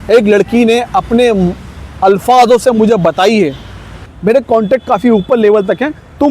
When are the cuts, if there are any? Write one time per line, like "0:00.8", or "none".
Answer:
0:04.1

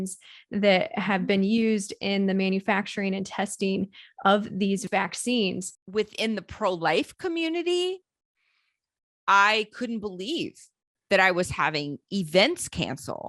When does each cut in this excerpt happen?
0:04.9
0:05.7

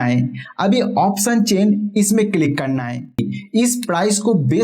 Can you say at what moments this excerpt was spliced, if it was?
0:03.2

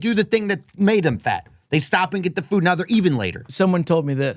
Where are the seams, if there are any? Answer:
0:03.4

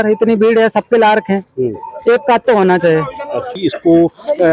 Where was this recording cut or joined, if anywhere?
0:03.5

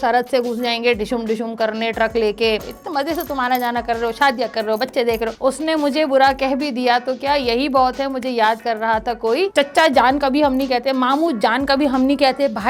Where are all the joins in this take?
0:02.6
0:05.3
0:09.5

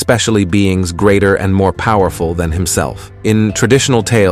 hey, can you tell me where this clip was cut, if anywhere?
none

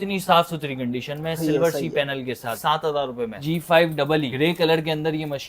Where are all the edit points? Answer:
0:02.6
0:03.4
0:04.3

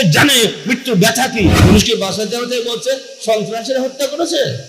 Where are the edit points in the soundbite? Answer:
0:01.6

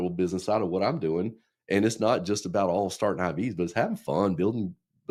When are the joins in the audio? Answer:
none

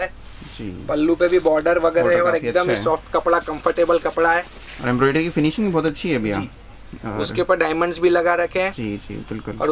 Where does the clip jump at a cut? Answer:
none

